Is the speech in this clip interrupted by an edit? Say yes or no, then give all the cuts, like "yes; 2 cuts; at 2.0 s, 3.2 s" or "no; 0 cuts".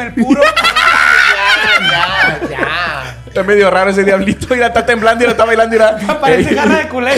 yes; 1 cut; at 3.3 s